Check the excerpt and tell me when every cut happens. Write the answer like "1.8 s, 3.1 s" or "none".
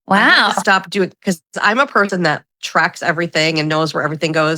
none